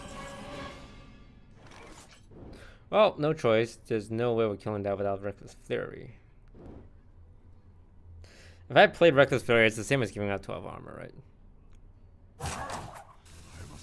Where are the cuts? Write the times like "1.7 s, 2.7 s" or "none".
2.5 s, 6.6 s